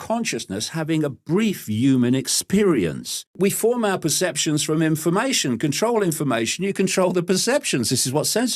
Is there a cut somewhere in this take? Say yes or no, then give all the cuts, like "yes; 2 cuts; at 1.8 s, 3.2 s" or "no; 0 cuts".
yes; 1 cut; at 3.3 s